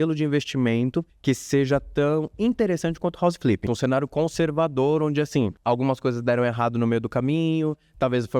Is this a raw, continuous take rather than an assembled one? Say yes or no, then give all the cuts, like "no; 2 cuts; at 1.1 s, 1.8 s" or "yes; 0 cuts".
no; 3 cuts; at 1.1 s, 3.6 s, 5.6 s